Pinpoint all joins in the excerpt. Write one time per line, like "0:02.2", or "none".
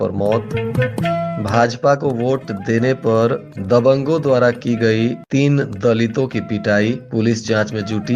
none